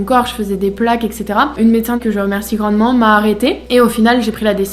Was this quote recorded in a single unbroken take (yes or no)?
no